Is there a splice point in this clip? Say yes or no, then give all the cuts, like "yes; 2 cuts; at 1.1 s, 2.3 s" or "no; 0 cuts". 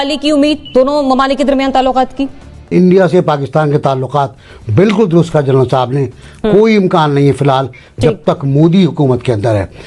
yes; 1 cut; at 2.7 s